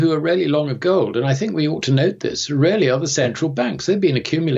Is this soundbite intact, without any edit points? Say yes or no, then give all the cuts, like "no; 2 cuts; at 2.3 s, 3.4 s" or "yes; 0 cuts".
yes; 0 cuts